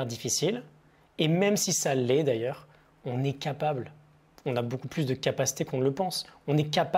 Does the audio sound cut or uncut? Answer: uncut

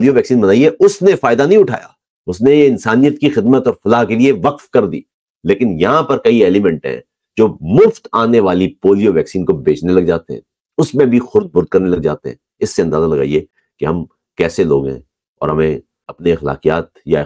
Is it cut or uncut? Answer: cut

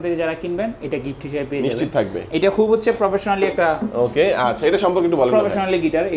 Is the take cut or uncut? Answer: uncut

